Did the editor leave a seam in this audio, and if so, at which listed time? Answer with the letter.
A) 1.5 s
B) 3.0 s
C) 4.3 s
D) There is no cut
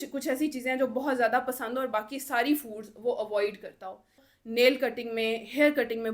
C